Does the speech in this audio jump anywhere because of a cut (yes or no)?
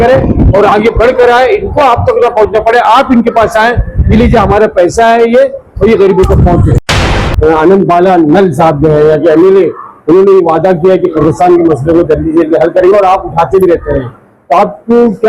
yes